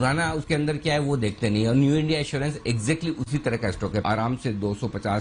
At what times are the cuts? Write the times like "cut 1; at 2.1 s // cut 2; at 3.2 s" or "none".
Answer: cut 1; at 4.0 s